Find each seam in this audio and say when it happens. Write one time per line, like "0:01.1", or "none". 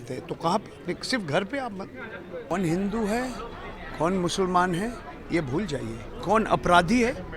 0:02.5